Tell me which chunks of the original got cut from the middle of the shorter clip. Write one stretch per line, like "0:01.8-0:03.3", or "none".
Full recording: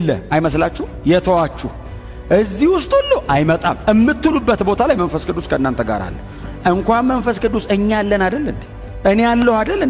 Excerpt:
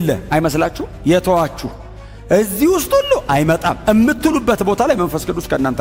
none